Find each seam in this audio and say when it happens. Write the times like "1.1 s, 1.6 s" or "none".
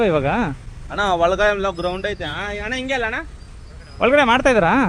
none